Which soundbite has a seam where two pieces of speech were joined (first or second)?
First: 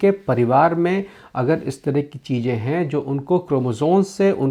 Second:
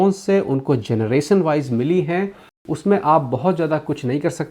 second